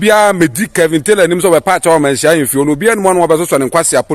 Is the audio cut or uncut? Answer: uncut